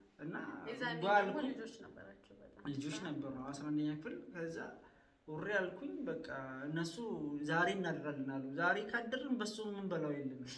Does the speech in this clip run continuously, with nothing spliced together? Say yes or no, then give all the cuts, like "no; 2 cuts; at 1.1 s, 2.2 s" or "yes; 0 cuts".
yes; 0 cuts